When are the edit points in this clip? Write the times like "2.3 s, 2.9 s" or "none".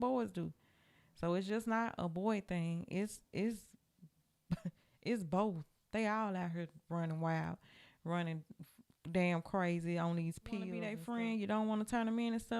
10.9 s